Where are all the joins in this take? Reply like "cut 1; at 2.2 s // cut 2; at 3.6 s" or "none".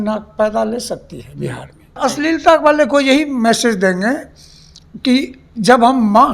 cut 1; at 2.0 s